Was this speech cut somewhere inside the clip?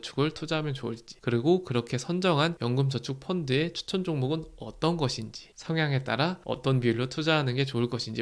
yes; 2 cuts; at 2.6 s, 6.4 s

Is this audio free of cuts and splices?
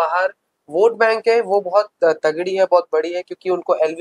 yes; 0 cuts

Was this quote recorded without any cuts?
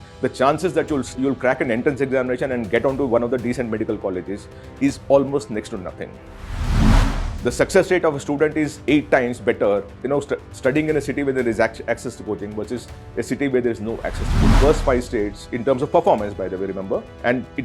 no; 2 cuts; at 1.1 s, 14.6 s

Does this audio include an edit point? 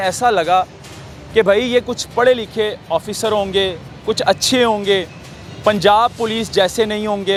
no; 0 cuts

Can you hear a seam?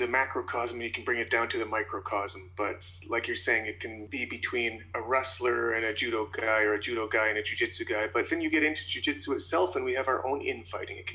yes; 1 cut; at 4.0 s

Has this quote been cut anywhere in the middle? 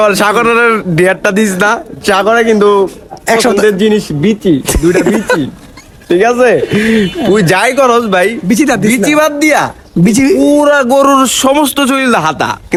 no; 0 cuts

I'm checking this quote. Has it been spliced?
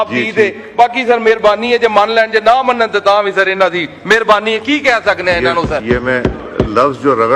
no; 0 cuts

